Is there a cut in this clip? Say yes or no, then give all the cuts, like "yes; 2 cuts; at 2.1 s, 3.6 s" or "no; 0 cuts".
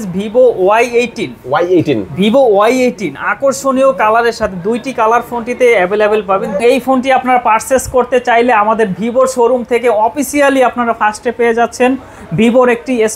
yes; 1 cut; at 6.6 s